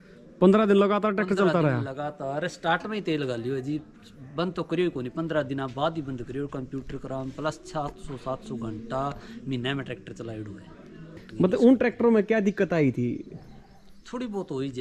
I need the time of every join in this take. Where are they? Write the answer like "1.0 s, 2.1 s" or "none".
11.2 s